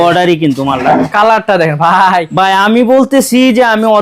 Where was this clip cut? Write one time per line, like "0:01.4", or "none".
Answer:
0:01.1

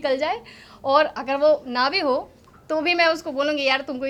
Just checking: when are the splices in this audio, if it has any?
none

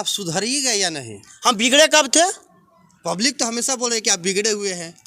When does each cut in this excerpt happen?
none

